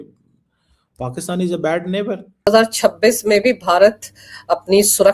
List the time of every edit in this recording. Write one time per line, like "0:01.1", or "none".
0:02.5